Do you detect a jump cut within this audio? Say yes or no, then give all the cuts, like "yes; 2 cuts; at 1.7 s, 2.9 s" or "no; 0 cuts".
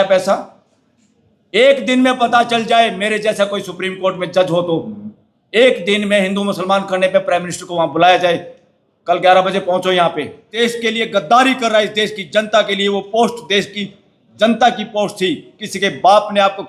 yes; 1 cut; at 10.4 s